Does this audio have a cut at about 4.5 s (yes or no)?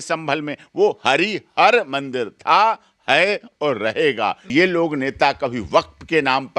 yes